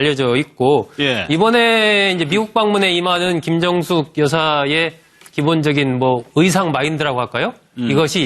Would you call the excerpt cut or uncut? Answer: cut